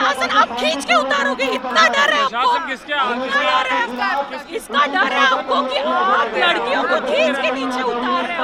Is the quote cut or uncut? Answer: uncut